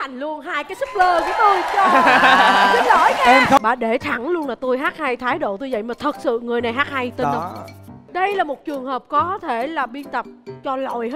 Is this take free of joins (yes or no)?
no